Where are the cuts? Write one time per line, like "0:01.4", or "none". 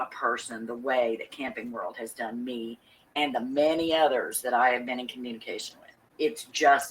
0:06.0